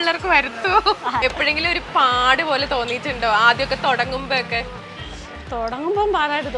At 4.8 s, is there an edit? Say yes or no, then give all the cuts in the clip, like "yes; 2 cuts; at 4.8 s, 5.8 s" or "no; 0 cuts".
no; 1 cut; at 1.2 s